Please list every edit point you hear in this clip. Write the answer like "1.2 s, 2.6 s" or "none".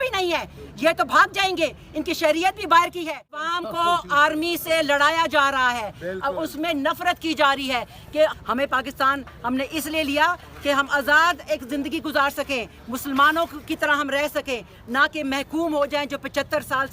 3.5 s, 8.4 s